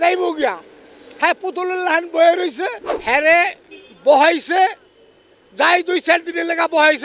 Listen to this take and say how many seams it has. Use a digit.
1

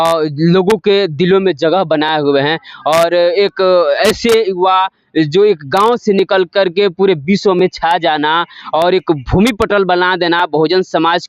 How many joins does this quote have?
0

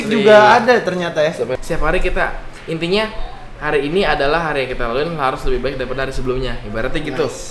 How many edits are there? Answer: 1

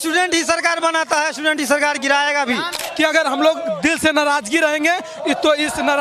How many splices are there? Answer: 1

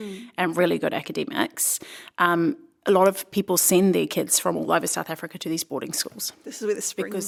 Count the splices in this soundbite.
0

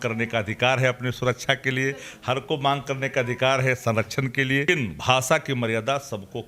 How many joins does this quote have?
1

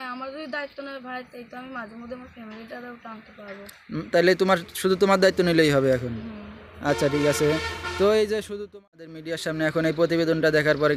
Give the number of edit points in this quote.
1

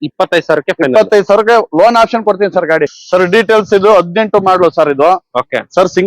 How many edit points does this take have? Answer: 1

